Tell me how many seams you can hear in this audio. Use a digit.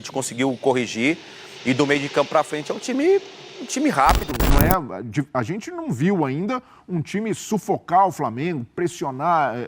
1